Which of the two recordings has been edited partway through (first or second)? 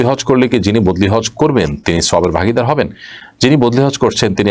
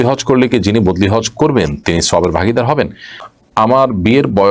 second